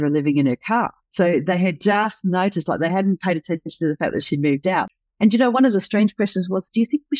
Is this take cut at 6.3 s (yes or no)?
no